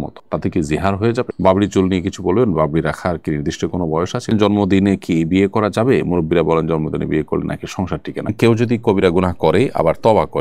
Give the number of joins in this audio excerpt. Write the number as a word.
three